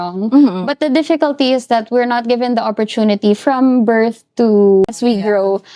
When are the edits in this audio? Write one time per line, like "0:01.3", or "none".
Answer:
0:04.9